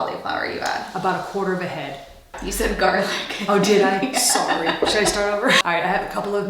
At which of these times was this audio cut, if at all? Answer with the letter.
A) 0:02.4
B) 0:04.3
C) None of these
A